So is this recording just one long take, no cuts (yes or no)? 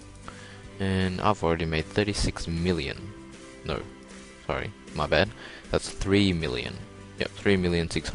yes